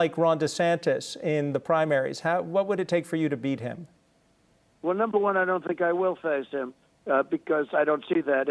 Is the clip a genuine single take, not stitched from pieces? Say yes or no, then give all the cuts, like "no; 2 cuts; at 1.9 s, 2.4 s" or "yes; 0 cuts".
yes; 0 cuts